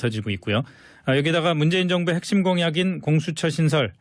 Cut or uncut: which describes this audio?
uncut